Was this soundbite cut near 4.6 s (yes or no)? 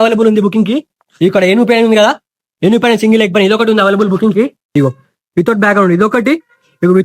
yes